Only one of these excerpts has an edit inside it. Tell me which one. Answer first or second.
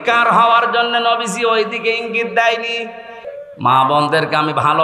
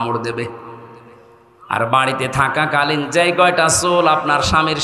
first